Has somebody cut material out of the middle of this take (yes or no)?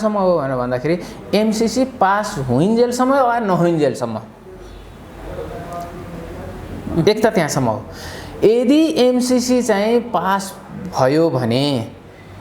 no